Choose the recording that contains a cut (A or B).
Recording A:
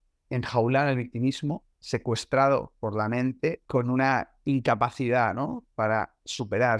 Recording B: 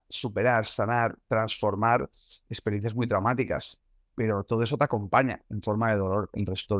A